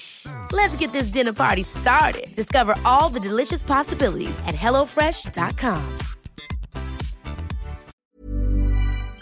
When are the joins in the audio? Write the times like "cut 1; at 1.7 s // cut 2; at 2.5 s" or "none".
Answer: cut 1; at 7.9 s